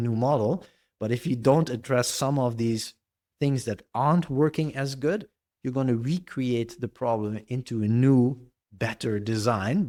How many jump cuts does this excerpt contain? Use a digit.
0